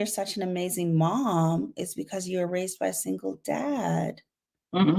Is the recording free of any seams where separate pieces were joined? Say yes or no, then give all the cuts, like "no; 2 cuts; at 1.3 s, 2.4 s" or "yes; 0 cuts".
yes; 0 cuts